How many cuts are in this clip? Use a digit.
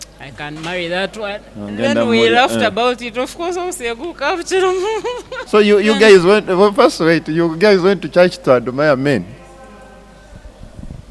1